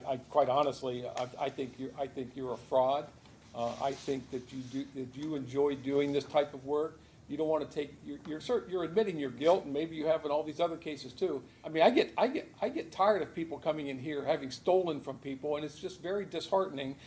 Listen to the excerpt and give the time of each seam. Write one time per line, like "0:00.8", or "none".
0:11.6